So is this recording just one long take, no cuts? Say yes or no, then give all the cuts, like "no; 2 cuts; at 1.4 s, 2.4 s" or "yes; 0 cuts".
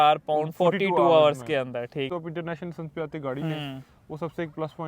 no; 1 cut; at 2.1 s